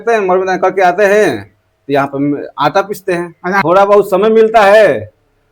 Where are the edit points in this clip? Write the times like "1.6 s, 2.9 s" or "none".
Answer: 3.6 s